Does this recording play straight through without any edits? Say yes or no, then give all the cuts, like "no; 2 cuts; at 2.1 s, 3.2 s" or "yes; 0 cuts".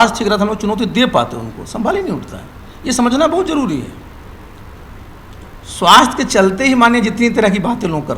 yes; 0 cuts